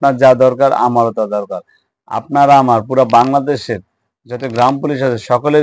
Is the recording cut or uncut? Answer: uncut